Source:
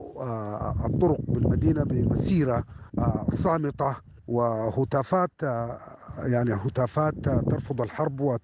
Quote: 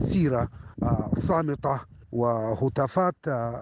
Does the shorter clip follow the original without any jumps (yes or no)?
yes